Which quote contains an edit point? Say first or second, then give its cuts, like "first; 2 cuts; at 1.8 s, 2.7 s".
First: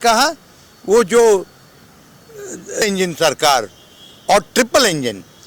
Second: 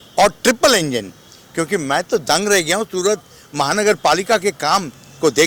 first; 1 cut; at 2.8 s